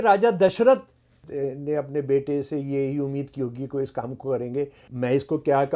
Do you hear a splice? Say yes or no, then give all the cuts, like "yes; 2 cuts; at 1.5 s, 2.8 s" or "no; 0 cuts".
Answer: yes; 2 cuts; at 1.3 s, 4.8 s